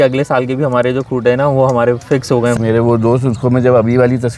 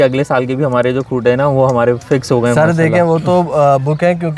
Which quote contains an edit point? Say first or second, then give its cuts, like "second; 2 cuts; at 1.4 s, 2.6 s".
first; 1 cut; at 2.5 s